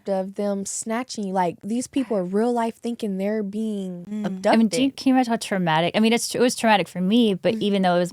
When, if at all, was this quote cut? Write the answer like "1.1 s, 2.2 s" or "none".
1.6 s, 4.0 s